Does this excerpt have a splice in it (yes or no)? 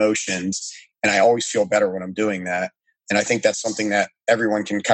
no